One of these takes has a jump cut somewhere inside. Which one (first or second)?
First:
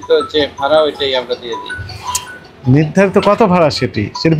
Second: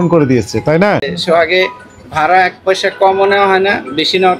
second